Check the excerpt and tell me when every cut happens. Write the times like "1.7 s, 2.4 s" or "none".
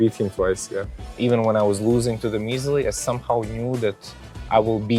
1.0 s